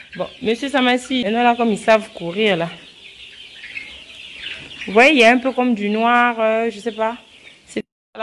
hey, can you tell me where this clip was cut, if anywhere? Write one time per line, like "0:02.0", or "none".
0:01.2